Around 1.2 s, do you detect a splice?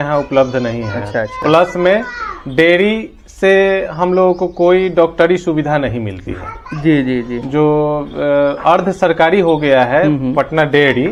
no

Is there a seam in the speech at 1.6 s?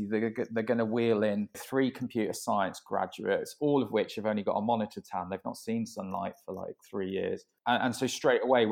yes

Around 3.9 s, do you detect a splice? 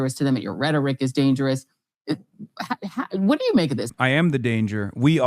yes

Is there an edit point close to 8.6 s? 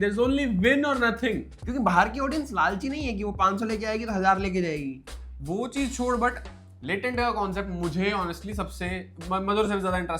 no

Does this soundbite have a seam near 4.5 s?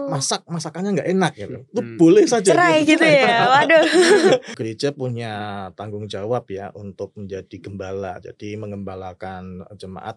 yes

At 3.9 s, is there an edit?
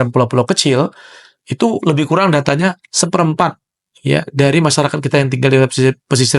no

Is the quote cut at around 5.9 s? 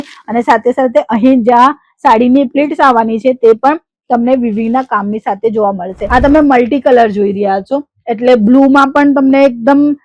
yes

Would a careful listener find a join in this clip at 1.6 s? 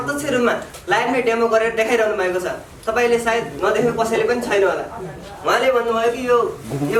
no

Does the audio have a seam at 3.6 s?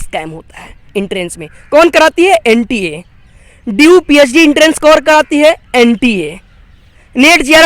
no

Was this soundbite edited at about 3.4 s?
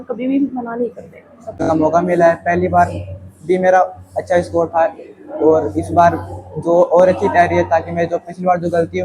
no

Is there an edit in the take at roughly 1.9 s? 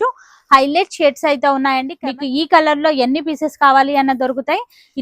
yes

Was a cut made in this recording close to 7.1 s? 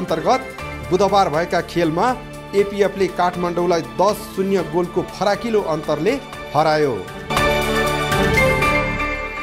yes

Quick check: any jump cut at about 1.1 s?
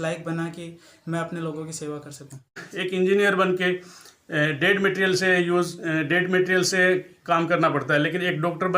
no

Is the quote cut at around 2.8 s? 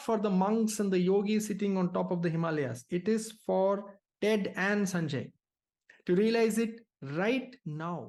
no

